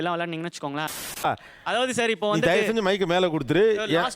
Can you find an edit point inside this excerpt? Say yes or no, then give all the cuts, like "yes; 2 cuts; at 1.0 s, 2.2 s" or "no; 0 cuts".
yes; 1 cut; at 0.9 s